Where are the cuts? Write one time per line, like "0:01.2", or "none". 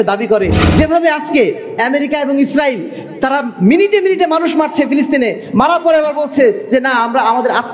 none